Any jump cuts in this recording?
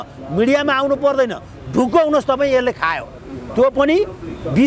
no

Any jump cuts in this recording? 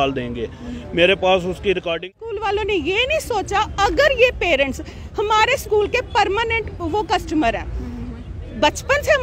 yes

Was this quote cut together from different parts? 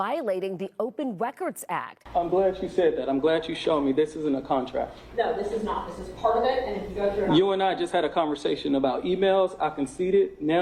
yes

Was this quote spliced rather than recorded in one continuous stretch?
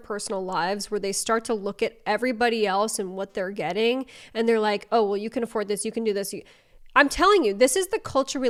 no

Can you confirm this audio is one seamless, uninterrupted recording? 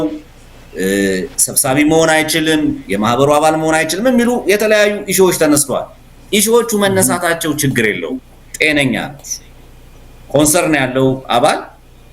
yes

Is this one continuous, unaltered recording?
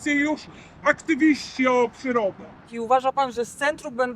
no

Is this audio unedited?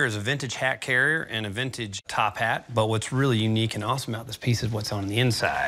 yes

